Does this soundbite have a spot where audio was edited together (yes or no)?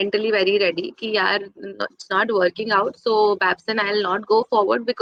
no